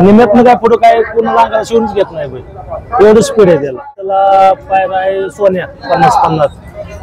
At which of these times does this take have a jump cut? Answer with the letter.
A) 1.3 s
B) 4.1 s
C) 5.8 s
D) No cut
B